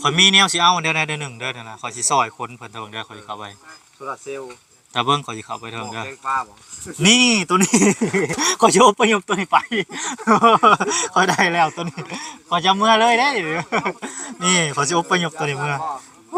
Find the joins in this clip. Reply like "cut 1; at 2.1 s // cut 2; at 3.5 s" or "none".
none